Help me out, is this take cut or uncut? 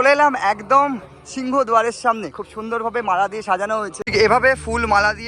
cut